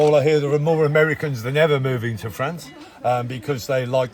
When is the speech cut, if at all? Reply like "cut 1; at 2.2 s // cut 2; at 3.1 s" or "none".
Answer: none